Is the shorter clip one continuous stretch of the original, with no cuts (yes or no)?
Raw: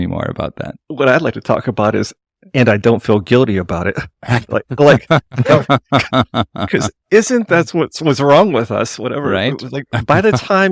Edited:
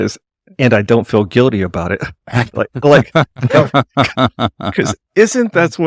yes